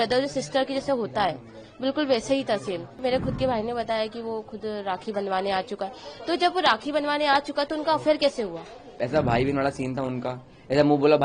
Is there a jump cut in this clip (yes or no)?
yes